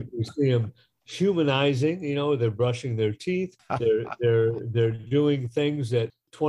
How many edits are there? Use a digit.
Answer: 1